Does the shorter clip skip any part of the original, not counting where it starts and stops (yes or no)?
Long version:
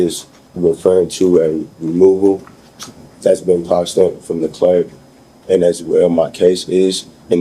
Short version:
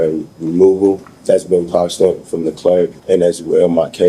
yes